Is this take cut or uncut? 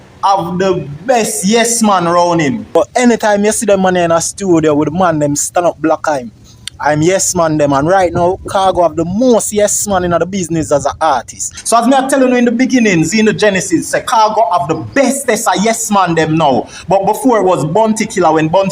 cut